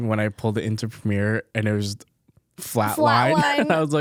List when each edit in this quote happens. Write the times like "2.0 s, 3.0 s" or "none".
none